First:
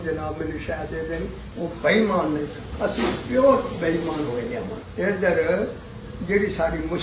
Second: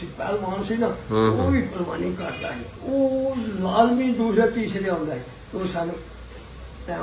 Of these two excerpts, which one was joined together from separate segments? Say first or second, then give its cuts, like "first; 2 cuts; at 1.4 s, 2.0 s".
first; 1 cut; at 1.5 s